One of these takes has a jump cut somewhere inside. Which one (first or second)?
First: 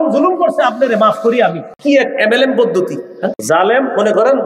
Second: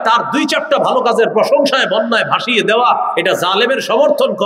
first